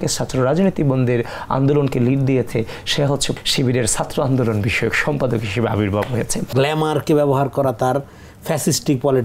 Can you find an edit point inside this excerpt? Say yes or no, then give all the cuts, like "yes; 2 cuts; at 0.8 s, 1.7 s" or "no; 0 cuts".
yes; 2 cuts; at 3.3 s, 6.5 s